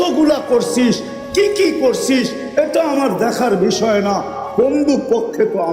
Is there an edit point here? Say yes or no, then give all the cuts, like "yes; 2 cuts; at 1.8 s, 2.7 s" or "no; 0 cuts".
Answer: no; 0 cuts